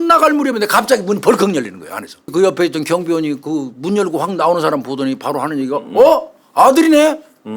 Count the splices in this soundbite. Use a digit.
1